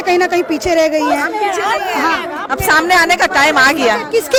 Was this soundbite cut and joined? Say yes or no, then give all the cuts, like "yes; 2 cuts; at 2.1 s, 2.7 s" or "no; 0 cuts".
no; 0 cuts